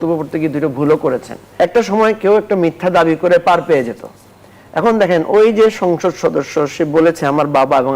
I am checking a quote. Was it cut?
yes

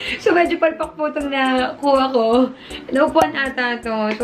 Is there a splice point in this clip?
no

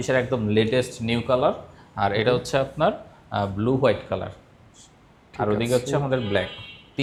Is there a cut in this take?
no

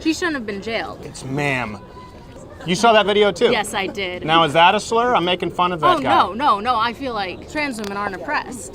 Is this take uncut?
no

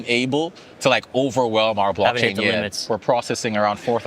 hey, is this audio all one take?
no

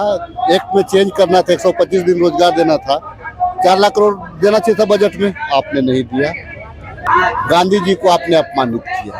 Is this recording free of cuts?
no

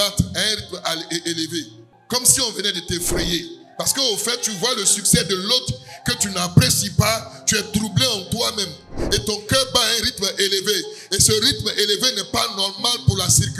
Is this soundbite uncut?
yes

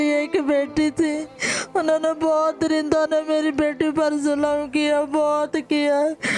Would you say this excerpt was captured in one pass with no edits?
yes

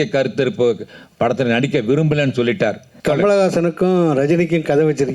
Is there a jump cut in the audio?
yes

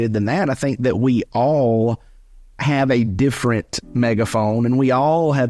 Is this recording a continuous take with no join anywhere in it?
yes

